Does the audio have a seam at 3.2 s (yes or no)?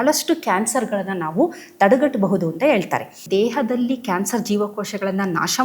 yes